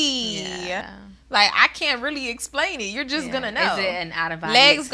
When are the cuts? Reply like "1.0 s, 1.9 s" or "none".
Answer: 1.0 s